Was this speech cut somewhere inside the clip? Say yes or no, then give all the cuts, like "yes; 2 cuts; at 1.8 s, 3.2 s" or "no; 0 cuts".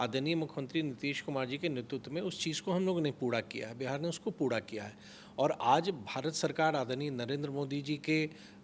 no; 0 cuts